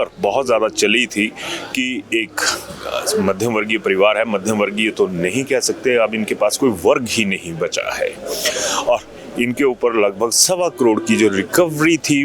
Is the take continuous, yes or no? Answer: yes